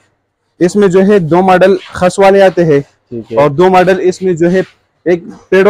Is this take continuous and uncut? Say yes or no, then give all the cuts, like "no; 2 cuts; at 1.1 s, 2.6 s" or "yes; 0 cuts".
yes; 0 cuts